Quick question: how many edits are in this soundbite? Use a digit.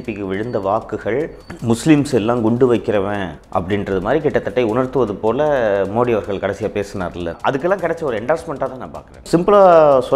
3